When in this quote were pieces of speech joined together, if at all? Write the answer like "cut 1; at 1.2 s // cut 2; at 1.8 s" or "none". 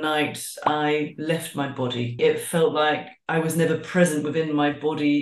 cut 1; at 2.2 s